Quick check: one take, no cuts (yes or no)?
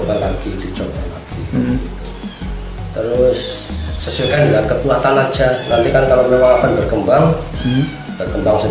yes